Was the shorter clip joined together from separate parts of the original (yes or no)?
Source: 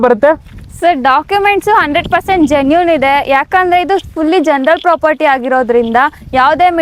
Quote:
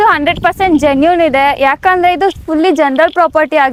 no